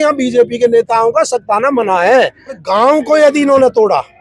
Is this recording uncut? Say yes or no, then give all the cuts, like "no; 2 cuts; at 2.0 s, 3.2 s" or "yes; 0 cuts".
no; 1 cut; at 2.6 s